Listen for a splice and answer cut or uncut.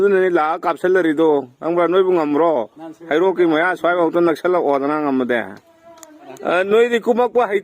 cut